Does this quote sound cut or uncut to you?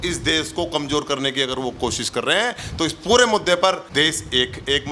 cut